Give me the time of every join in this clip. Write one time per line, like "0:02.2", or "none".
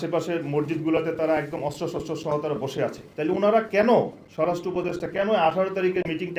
0:03.1

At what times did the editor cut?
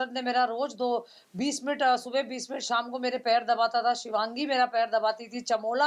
none

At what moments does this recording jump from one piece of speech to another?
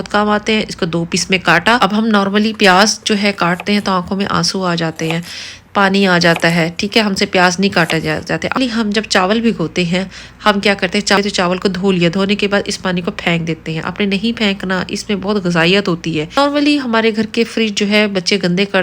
0:01.8
0:08.6
0:11.2
0:16.4

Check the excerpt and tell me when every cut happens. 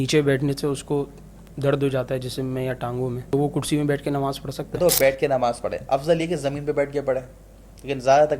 0:03.3
0:04.8

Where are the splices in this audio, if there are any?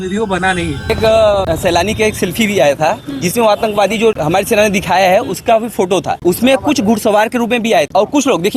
0:00.9

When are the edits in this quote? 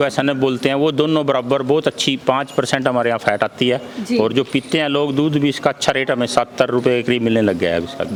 none

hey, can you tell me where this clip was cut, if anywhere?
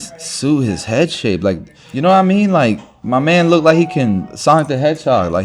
0:04.3

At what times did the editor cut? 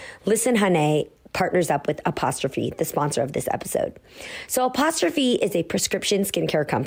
none

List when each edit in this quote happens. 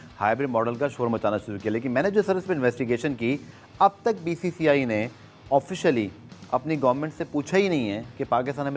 none

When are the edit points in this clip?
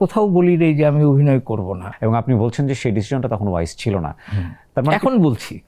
0:01.8

